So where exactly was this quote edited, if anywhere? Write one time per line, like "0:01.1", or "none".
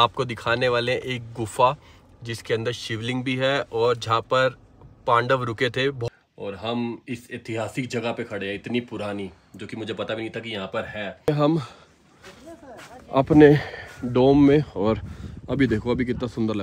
0:06.0
0:11.3